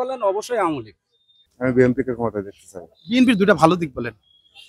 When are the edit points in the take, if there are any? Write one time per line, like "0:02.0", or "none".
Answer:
0:01.4